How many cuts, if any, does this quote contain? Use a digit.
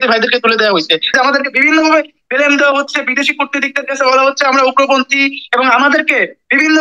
1